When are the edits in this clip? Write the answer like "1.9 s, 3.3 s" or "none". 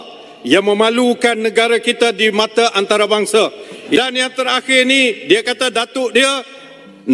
4.0 s